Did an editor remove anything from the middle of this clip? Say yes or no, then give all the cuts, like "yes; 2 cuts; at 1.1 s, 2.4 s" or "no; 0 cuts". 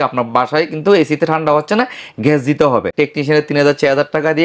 yes; 1 cut; at 2.9 s